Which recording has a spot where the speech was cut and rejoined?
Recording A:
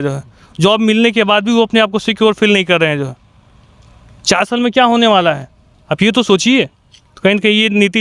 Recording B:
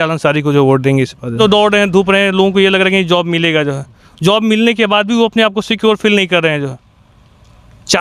B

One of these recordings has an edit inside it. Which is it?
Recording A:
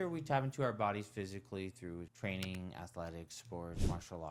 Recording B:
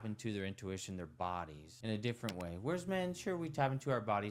B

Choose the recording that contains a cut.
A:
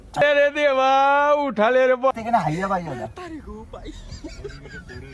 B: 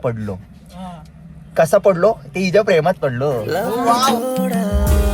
A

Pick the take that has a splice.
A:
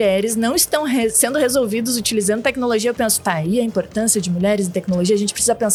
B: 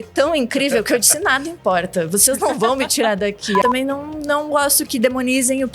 B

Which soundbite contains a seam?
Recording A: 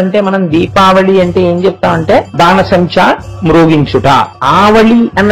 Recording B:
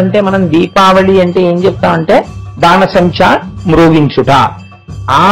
A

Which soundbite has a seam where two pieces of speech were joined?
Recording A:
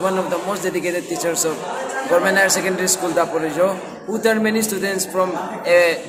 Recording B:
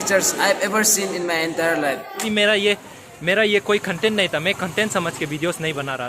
B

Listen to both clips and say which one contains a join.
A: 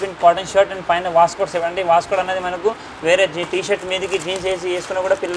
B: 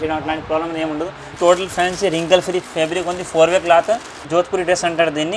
B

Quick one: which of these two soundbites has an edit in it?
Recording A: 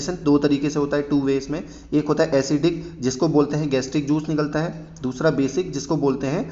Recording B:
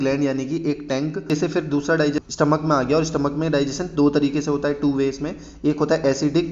B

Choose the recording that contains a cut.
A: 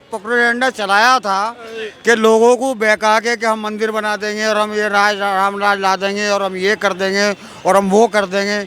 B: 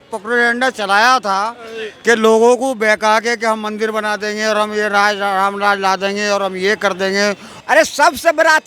B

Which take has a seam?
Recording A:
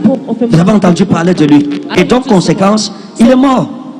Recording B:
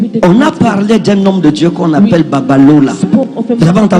A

